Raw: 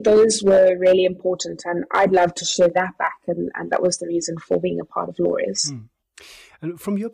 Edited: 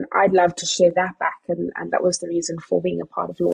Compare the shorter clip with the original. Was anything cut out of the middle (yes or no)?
no